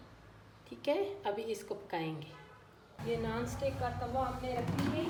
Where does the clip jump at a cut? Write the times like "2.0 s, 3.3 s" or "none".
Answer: none